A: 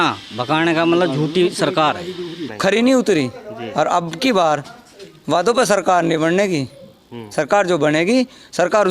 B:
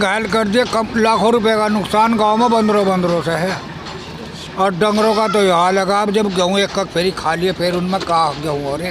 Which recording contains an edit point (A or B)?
A